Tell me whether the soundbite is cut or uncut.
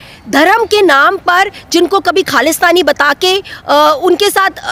uncut